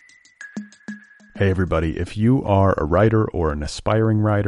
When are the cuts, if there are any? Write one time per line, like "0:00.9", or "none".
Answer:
0:00.9